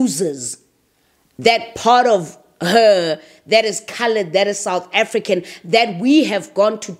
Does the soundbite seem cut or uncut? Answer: uncut